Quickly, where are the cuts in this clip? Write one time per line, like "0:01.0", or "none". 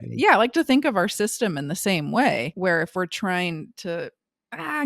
0:02.5

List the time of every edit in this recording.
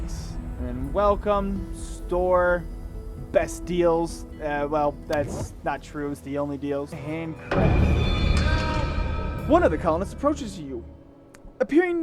0:07.0

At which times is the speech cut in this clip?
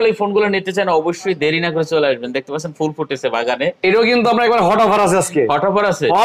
none

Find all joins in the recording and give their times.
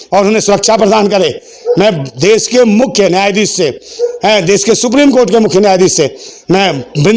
none

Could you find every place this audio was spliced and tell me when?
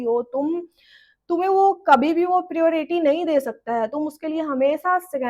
none

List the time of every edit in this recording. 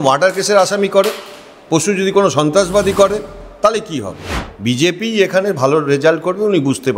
0:04.5

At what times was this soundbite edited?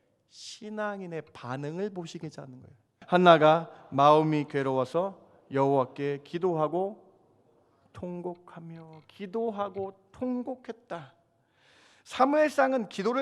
0:02.9

